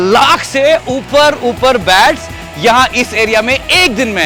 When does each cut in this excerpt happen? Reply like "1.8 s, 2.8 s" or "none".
none